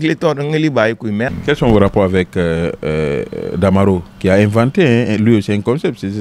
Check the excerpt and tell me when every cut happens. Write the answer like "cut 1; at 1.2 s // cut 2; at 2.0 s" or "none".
cut 1; at 1.3 s